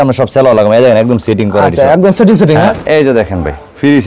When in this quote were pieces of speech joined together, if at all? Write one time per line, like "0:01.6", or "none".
0:02.7